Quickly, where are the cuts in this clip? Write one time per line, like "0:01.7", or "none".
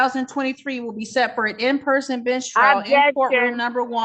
none